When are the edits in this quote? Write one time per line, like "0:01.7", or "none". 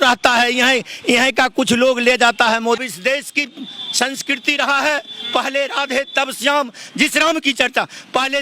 0:02.9